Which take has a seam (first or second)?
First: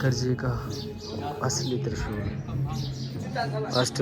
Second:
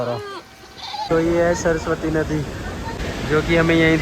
second